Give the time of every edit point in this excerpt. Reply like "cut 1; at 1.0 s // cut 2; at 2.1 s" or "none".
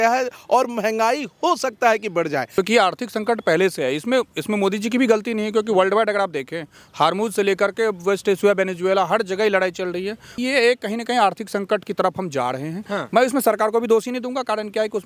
cut 1; at 2.5 s // cut 2; at 10.3 s